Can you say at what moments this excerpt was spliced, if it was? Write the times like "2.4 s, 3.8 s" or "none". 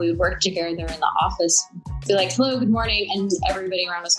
1.8 s